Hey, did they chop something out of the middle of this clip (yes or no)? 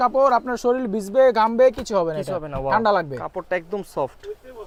no